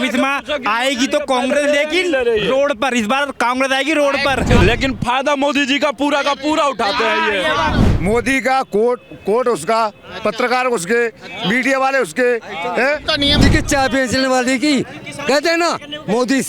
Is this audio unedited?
no; 3 cuts; at 4.6 s, 7.9 s, 13.5 s

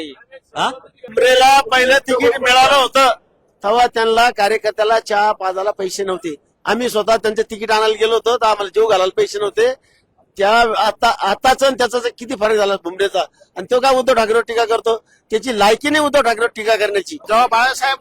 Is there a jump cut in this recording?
yes; 2 cuts; at 1.0 s, 17.2 s

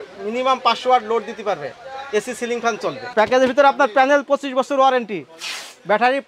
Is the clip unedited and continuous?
no; 1 cut; at 3.0 s

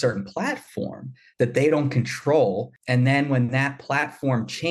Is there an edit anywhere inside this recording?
yes; 1 cut; at 2.7 s

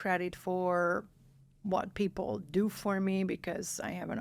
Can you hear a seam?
no; 0 cuts

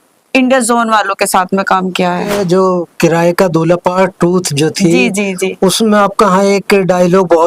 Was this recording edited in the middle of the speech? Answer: yes; 1 cut; at 2.4 s

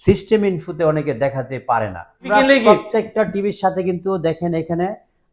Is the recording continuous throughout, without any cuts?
no; 1 cut; at 2.3 s

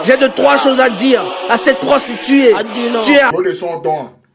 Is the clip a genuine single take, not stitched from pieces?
no; 1 cut; at 3.3 s

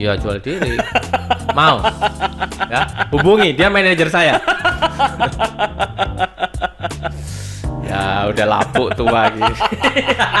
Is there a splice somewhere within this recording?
no; 0 cuts

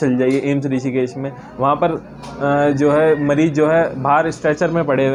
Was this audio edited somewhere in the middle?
no; 0 cuts

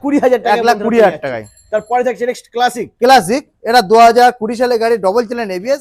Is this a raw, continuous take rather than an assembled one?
yes; 0 cuts

